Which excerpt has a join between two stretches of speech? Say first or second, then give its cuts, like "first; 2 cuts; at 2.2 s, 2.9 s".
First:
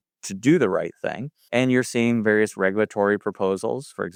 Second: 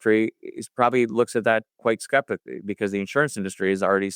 second; 1 cut; at 2.8 s